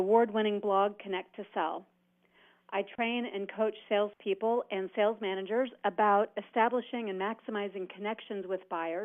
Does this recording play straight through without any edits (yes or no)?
yes